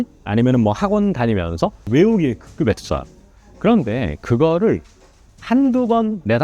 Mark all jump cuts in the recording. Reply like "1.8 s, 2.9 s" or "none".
1.8 s